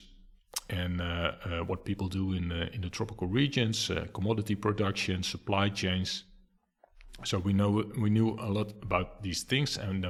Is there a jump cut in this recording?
no; 0 cuts

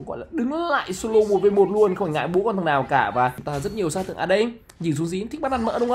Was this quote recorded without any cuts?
no; 1 cut; at 3.4 s

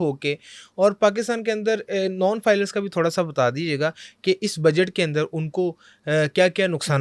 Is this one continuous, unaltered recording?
yes; 0 cuts

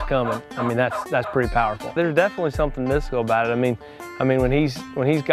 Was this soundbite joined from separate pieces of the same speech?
yes; 1 cut; at 1.9 s

